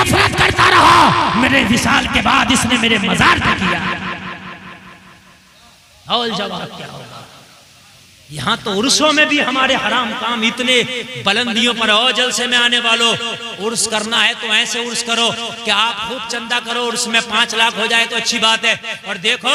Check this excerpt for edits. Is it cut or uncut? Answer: uncut